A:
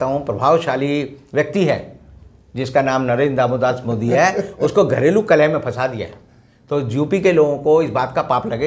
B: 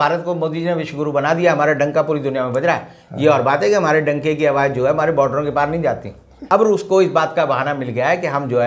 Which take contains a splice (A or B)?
B